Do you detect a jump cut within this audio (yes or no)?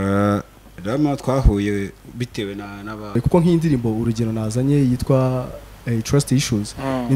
yes